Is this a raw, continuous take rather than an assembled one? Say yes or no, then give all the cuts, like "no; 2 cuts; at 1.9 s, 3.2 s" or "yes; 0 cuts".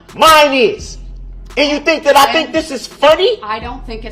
yes; 0 cuts